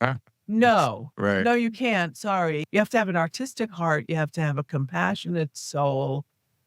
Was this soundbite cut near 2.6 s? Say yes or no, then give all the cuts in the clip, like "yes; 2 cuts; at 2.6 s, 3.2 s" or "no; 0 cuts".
yes; 1 cut; at 2.6 s